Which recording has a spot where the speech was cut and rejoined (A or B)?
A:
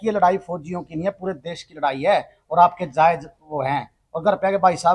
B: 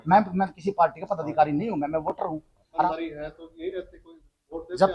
B